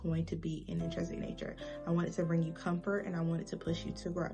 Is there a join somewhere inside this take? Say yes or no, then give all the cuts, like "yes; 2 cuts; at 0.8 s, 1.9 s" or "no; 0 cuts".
no; 0 cuts